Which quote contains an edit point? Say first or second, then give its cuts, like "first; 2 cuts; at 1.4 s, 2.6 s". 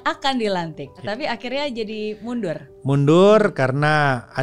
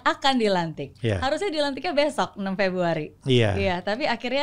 first; 1 cut; at 1.0 s